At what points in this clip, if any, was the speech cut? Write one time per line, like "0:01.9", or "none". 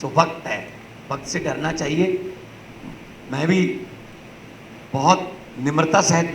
none